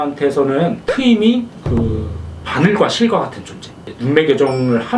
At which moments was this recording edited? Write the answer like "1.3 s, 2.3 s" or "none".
0.9 s, 1.6 s